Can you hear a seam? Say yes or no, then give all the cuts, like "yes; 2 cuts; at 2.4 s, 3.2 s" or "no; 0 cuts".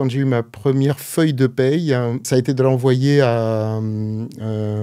yes; 1 cut; at 2.2 s